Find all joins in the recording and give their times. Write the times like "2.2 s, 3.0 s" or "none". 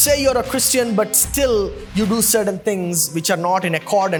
none